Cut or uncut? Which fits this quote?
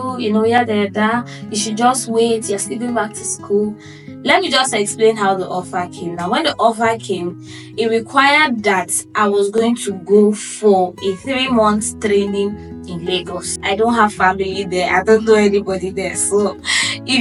uncut